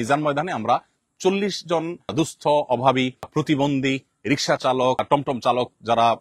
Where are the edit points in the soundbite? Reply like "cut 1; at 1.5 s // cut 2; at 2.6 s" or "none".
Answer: cut 1; at 2.1 s // cut 2; at 3.3 s // cut 3; at 5.0 s